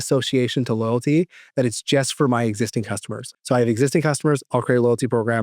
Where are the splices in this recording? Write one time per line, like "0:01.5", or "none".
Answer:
0:03.3